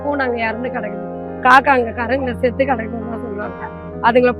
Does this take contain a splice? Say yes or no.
no